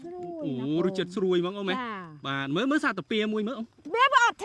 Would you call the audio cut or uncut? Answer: uncut